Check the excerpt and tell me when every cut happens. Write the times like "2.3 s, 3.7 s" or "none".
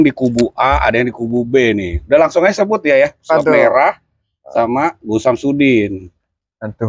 none